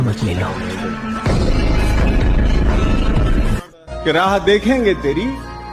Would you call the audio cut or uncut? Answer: uncut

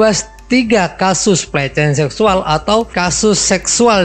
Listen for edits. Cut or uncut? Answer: uncut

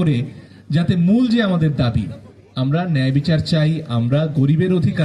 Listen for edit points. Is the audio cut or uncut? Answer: uncut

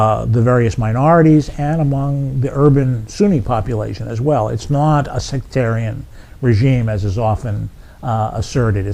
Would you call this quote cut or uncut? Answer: uncut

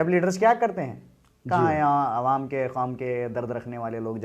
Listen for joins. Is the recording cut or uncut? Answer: uncut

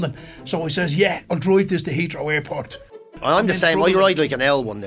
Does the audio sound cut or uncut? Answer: cut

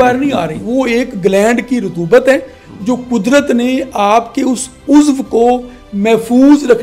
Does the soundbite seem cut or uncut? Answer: uncut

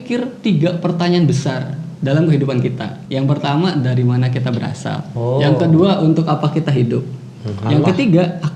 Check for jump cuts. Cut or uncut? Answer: cut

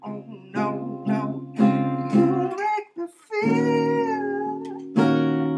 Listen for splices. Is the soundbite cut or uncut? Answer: uncut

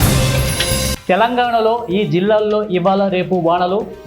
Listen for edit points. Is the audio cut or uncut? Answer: cut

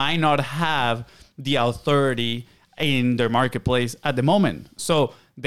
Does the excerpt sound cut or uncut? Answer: uncut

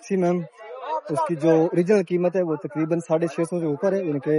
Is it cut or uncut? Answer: uncut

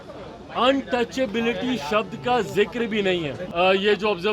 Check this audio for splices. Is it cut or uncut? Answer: cut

